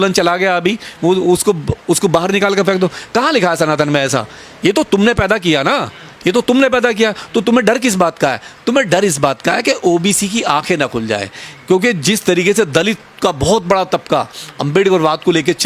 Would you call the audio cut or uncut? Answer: uncut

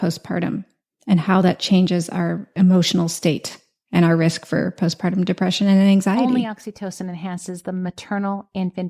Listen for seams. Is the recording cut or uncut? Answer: cut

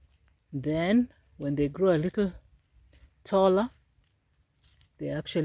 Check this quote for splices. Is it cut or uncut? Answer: uncut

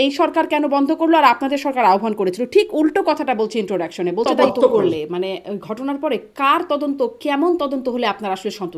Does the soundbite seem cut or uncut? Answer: cut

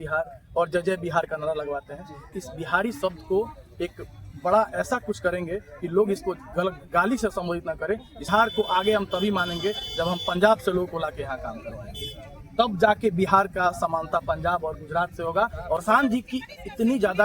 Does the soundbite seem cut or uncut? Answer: cut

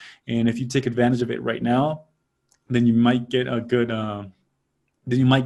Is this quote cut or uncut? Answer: uncut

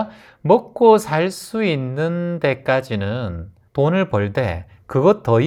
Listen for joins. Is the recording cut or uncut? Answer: uncut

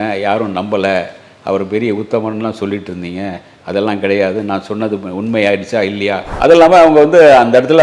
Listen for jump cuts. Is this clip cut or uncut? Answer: cut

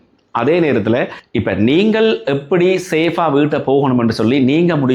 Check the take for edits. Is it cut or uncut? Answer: cut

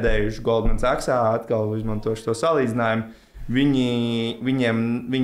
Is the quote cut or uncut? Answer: uncut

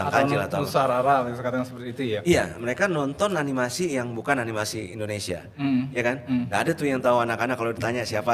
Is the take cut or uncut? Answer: uncut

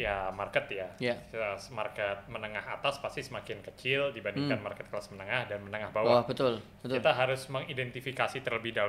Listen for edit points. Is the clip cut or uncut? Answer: uncut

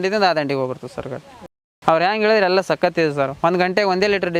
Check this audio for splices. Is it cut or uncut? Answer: uncut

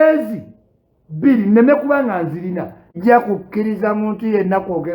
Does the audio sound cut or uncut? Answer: cut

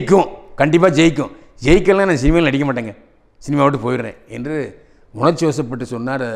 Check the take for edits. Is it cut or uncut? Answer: uncut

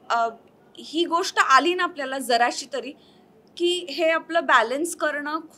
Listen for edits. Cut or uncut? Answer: uncut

